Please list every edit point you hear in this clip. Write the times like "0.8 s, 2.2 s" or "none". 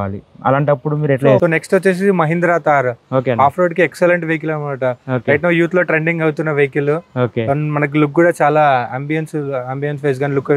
1.4 s